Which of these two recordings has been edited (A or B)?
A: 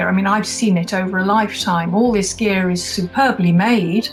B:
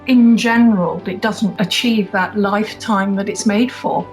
B